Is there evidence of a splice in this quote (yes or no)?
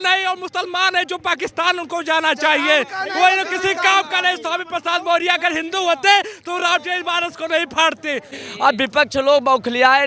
yes